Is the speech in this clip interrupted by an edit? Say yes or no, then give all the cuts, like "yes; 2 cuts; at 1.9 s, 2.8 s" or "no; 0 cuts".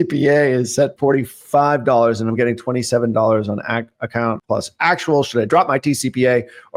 yes; 2 cuts; at 0.9 s, 4.4 s